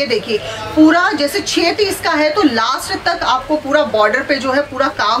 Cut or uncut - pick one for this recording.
uncut